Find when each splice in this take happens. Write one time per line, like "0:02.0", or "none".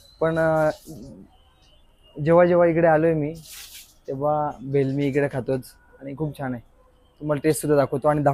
none